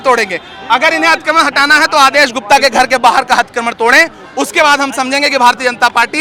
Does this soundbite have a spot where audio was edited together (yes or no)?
no